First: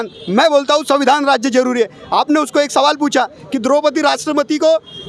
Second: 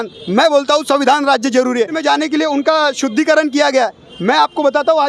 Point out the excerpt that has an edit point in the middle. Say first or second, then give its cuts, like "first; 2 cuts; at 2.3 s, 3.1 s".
second; 1 cut; at 2.0 s